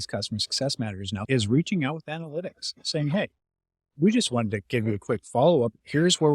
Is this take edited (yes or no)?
yes